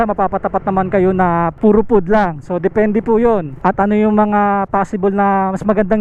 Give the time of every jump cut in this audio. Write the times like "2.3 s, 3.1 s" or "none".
1.5 s, 3.5 s